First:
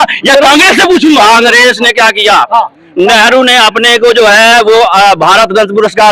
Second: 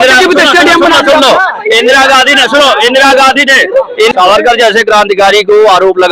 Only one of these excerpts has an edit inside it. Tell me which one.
second; 1 cut; at 4.1 s

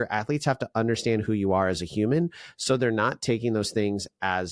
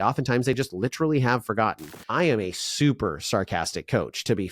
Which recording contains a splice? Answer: second; 1 cut; at 1.9 s

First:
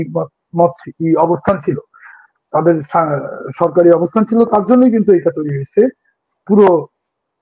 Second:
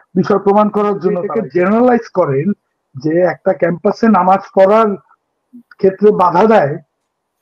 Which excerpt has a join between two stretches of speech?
second; 1 cut; at 1.3 s

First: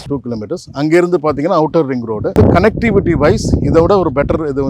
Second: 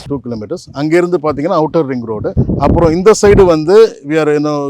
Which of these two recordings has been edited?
first; 1 cut; at 2.3 s

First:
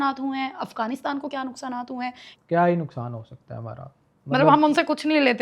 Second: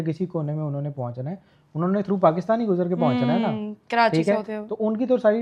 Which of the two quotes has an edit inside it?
first; 1 cut; at 2.3 s

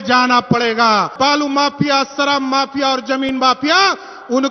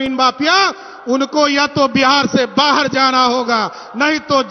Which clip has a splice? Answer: first; 1 cut; at 1.1 s

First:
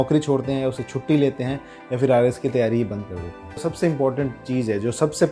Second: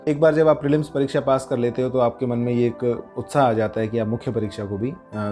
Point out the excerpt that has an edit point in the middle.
first; 1 cut; at 3.7 s

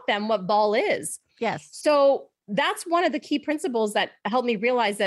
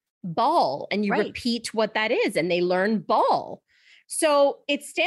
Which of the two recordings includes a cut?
second; 1 cut; at 3.9 s

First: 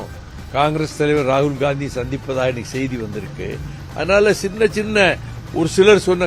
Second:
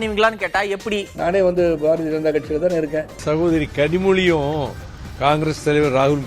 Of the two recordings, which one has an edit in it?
second; 2 cuts; at 1.1 s, 3.1 s

